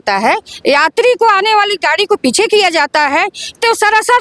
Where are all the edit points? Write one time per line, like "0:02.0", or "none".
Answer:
none